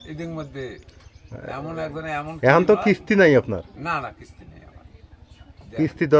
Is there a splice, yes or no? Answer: no